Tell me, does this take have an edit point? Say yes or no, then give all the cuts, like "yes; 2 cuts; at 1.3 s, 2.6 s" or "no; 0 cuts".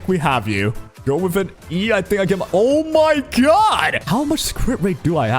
yes; 2 cuts; at 0.9 s, 4.0 s